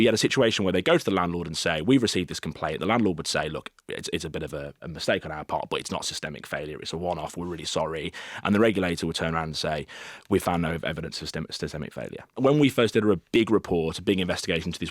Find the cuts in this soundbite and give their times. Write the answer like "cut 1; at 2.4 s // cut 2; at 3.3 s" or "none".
cut 1; at 4.8 s // cut 2; at 12.4 s